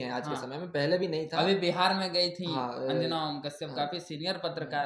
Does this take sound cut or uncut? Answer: uncut